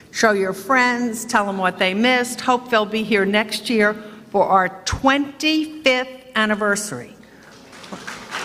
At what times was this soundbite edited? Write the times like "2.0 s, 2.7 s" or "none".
none